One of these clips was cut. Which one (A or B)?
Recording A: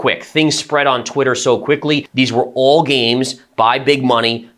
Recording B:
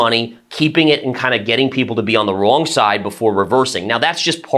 A